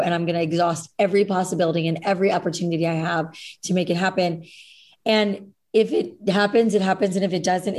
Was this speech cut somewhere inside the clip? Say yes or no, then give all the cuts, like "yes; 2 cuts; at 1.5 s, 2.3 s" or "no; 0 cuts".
no; 0 cuts